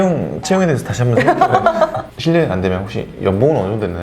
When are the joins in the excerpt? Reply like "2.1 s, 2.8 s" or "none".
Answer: 2.1 s